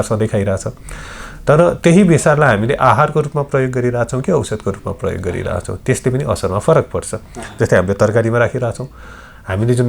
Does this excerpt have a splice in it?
no; 0 cuts

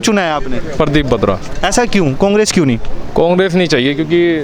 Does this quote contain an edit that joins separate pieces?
no; 0 cuts

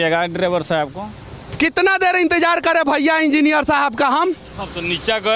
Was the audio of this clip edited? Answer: no; 0 cuts

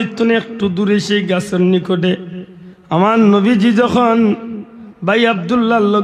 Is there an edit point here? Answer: no; 0 cuts

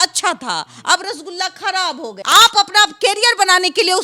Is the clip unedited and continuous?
no; 1 cut; at 2.1 s

